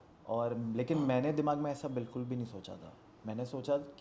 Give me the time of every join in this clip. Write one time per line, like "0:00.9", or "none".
none